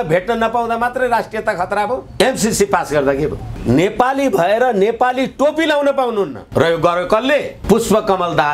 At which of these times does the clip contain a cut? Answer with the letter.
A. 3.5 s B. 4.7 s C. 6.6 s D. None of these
A